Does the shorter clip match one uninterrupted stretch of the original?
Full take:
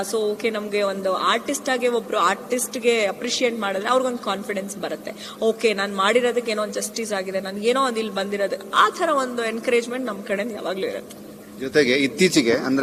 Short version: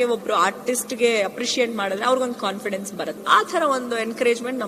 no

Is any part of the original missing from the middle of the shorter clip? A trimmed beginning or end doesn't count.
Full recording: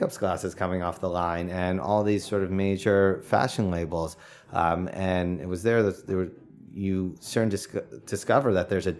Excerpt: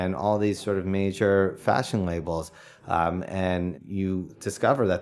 yes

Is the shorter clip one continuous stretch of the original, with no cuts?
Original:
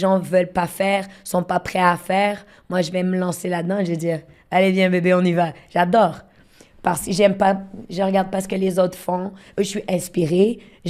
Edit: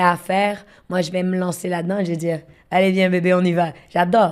yes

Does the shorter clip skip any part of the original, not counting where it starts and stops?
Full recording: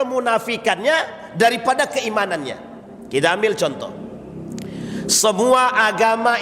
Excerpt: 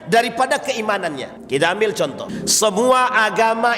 yes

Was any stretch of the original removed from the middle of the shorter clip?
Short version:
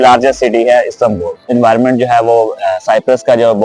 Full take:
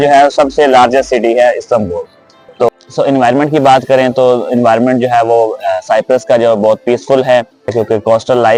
yes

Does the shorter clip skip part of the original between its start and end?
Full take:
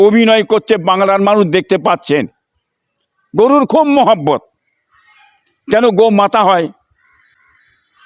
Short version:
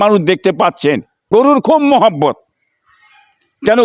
yes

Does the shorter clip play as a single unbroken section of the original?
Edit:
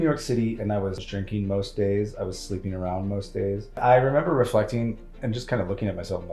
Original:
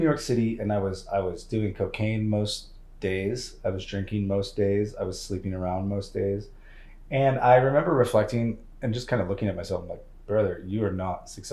no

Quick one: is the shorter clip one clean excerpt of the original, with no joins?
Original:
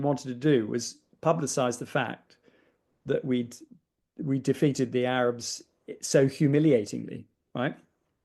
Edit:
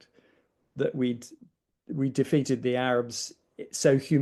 yes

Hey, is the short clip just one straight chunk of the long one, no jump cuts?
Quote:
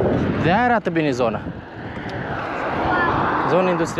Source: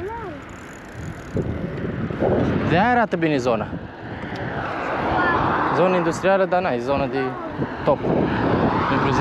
yes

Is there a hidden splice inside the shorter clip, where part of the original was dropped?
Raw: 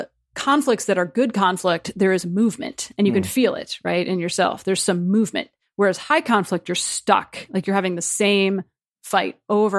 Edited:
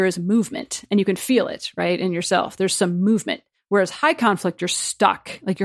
no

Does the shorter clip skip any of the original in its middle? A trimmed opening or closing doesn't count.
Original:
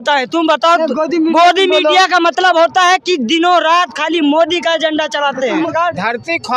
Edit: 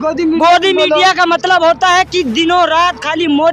no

